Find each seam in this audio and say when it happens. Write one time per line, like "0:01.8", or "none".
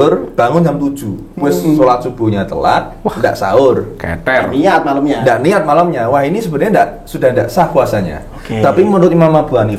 none